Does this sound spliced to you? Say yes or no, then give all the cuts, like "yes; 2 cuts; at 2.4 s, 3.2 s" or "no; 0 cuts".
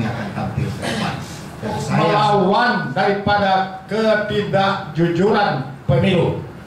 yes; 1 cut; at 1.9 s